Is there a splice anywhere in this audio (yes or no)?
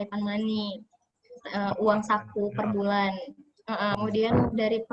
yes